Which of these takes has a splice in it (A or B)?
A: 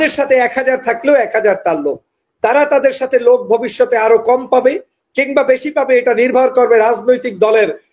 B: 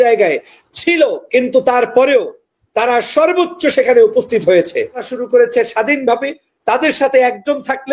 B